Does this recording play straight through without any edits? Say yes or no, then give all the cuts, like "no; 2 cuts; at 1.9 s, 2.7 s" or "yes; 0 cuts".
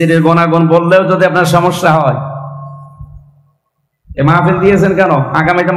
yes; 0 cuts